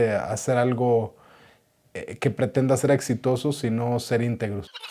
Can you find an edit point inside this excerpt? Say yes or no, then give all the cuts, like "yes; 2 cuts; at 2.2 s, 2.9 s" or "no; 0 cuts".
no; 0 cuts